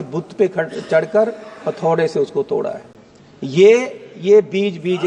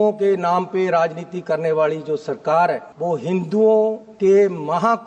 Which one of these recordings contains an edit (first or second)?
second